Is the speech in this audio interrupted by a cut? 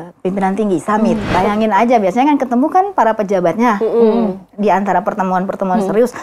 yes; 1 cut; at 1.3 s

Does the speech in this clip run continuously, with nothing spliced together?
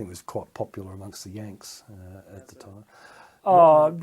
no; 1 cut; at 3.0 s

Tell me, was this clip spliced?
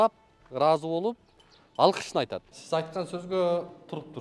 yes; 1 cut; at 2.5 s

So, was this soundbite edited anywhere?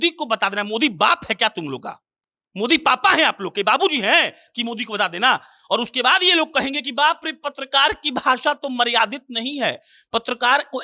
no; 0 cuts

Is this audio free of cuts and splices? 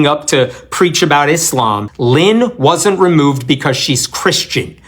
no; 1 cut; at 1.9 s

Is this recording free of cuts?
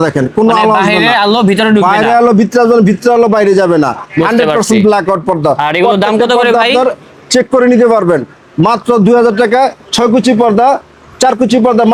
yes; 0 cuts

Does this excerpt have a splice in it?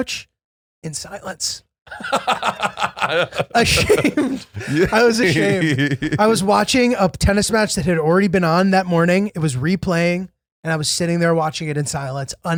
no; 0 cuts

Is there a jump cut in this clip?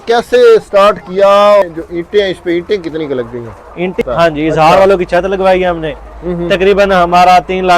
yes; 2 cuts; at 1.6 s, 4.0 s

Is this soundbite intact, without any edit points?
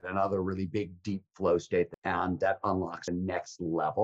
no; 2 cuts; at 2.0 s, 3.0 s

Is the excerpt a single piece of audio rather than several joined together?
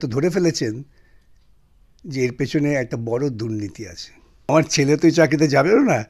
no; 1 cut; at 4.5 s

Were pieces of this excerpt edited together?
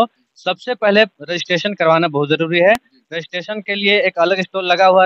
no; 0 cuts

